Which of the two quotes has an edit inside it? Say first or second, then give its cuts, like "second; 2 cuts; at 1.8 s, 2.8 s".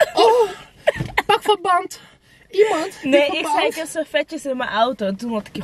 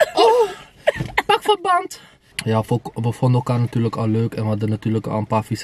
second; 1 cut; at 2.4 s